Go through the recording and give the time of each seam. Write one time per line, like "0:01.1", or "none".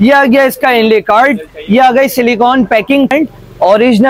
0:03.1